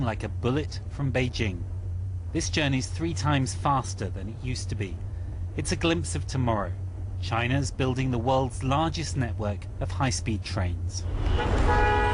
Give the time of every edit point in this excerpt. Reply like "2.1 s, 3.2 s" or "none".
none